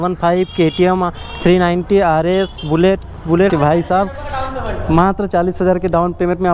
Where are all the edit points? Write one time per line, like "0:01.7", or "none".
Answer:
0:03.5